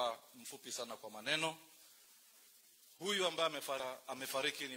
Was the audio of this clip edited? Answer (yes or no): yes